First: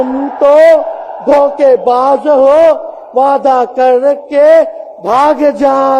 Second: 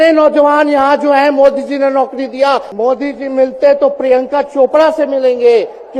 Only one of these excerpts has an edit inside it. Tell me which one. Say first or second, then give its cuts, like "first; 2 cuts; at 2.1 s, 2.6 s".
second; 1 cut; at 2.7 s